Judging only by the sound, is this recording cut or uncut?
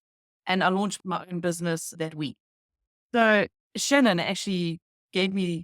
cut